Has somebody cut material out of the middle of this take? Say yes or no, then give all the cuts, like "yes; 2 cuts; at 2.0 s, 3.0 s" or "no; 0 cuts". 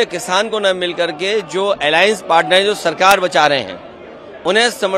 no; 0 cuts